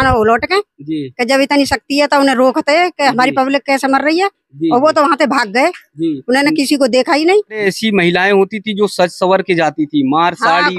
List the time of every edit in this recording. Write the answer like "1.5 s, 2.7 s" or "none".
7.6 s